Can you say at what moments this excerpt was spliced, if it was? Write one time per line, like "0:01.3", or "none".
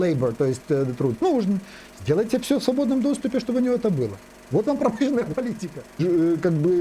0:05.8